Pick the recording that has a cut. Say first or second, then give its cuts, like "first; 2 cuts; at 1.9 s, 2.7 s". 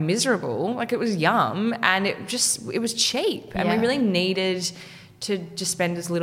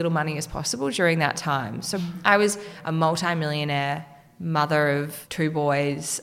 second; 3 cuts; at 2.0 s, 2.7 s, 5.2 s